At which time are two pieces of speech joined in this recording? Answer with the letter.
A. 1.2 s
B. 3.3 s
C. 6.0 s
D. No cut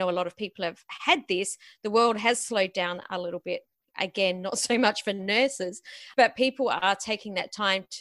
C